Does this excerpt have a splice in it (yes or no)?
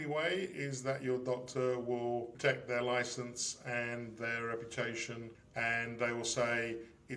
yes